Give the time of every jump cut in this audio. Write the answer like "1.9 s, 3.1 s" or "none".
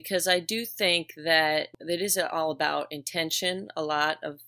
1.7 s